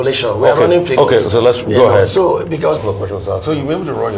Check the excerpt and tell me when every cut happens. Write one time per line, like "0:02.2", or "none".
0:02.8